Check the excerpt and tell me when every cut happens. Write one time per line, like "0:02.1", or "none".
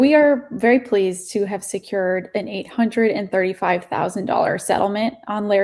none